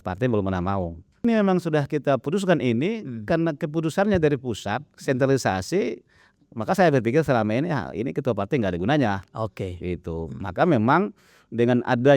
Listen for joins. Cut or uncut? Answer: cut